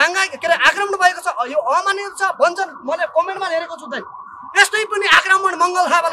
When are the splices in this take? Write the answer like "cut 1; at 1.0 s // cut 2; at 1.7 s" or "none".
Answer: none